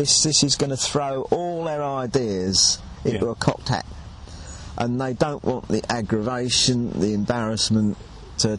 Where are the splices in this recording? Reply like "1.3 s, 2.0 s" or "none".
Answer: none